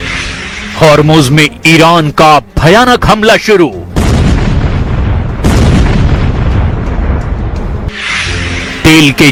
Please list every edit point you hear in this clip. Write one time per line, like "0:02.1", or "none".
none